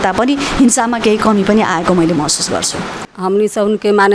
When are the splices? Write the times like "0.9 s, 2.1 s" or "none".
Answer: 3.0 s